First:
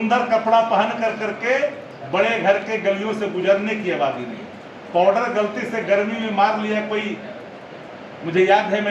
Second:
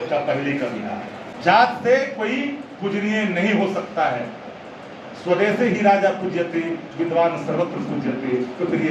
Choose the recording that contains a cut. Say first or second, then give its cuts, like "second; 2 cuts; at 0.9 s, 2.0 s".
second; 1 cut; at 1.2 s